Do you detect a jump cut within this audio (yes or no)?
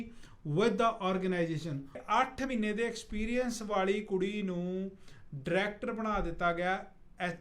yes